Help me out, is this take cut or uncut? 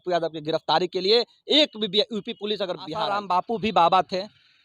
cut